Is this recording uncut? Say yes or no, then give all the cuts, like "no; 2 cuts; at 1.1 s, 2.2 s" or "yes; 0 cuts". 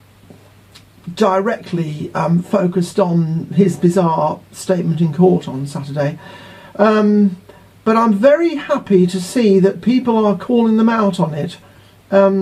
yes; 0 cuts